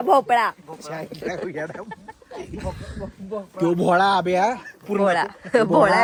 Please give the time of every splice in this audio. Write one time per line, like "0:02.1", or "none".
none

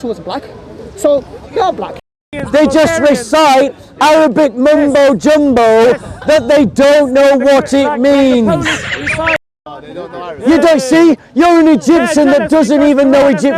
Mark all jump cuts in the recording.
0:02.3
0:09.5

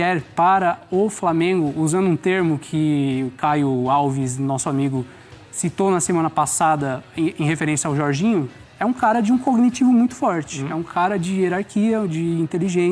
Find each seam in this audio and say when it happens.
none

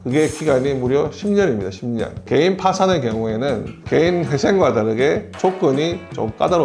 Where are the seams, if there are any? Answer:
0:02.2
0:05.3

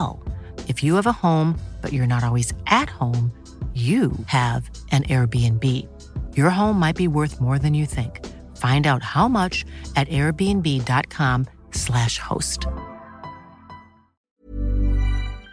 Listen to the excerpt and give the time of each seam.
0:14.2

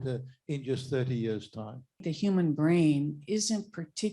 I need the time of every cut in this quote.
0:02.0

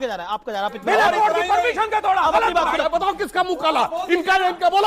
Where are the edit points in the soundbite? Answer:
0:02.8

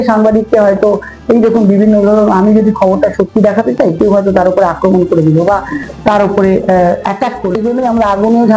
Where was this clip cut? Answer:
0:07.5

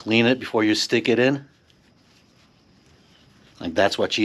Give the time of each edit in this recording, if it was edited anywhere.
none

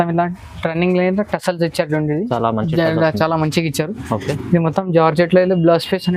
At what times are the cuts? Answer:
none

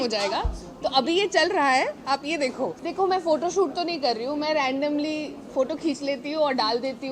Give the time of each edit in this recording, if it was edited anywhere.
0:02.8

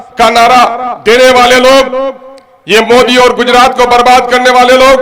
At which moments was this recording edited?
none

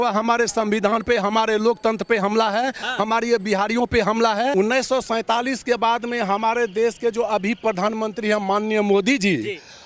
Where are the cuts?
0:04.5

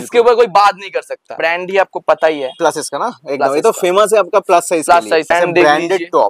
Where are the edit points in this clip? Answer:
0:01.3
0:05.3

